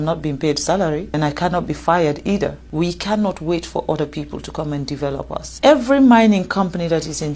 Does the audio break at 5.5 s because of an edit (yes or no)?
yes